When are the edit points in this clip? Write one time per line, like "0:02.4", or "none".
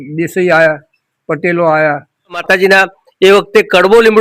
0:02.4